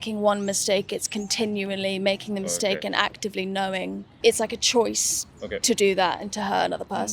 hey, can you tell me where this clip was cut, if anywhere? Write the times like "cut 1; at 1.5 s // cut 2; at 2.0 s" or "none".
cut 1; at 4.0 s